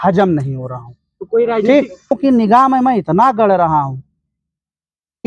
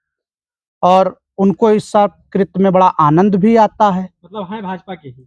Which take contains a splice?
first; 1 cut; at 2.2 s

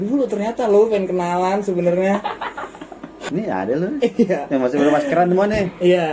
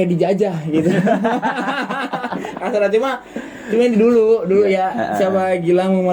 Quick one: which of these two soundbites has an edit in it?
first; 1 cut; at 3.2 s

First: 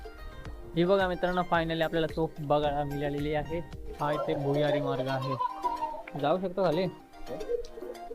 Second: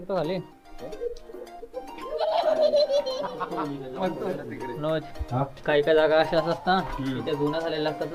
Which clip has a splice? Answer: first; 1 cut; at 3.8 s

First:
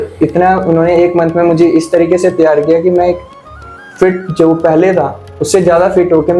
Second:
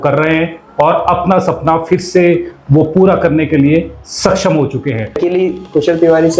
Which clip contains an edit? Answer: second; 1 cut; at 5.2 s

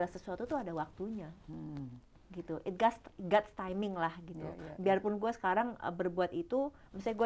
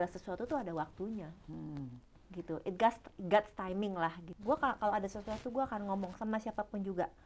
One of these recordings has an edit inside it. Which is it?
second; 1 cut; at 4.3 s

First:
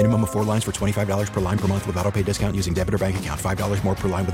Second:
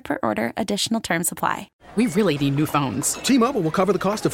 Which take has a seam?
second; 1 cut; at 1.8 s

